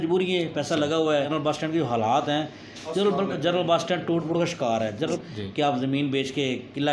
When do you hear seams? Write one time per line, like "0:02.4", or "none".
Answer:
0:01.3
0:05.0